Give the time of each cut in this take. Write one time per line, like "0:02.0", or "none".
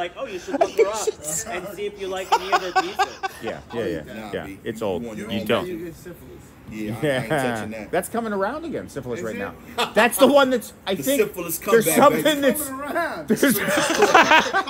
0:03.4